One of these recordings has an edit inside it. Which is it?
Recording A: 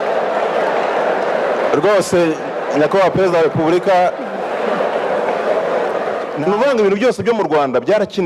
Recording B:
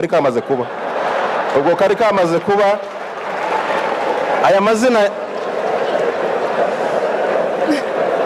A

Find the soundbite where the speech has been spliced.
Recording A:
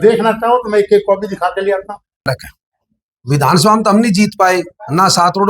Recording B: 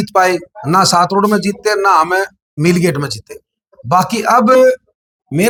A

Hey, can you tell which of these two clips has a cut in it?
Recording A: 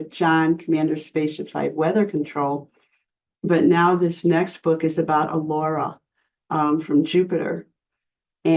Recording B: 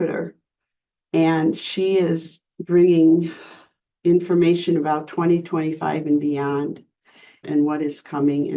B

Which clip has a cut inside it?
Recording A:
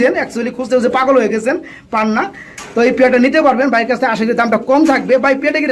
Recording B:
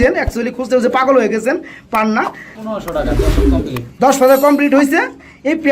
B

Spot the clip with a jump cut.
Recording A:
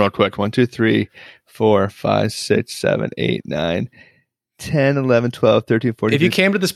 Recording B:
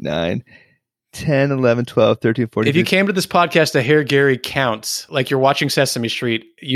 B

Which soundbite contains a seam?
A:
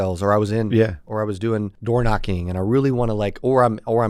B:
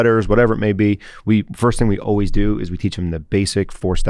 A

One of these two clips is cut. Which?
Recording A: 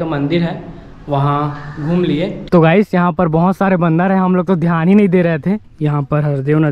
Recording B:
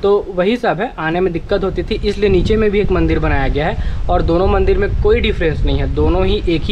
A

